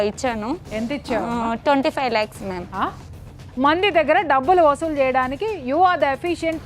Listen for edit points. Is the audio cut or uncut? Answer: cut